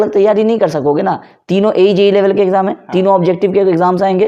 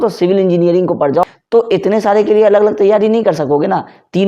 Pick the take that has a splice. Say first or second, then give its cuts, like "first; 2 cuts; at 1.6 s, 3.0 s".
second; 1 cut; at 1.3 s